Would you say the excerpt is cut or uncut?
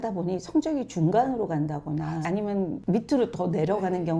cut